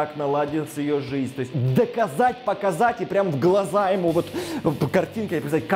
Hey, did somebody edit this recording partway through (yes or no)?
yes